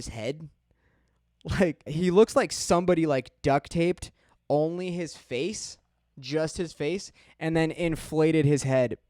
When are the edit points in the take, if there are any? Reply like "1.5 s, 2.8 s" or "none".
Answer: 1.9 s